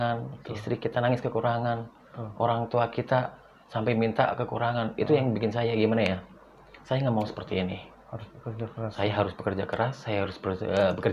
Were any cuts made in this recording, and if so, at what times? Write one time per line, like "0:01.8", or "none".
none